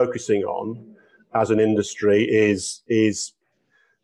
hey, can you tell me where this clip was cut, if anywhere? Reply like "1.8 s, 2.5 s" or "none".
none